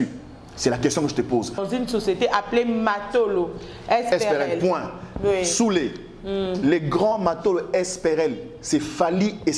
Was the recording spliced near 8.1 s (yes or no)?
no